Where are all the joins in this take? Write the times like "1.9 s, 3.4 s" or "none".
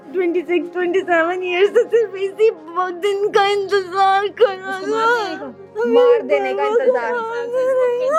none